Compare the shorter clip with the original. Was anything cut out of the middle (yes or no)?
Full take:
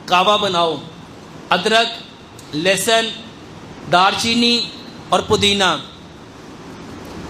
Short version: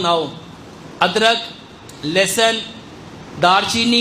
no